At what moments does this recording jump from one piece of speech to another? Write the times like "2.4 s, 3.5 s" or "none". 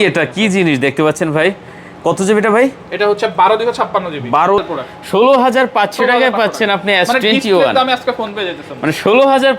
4.6 s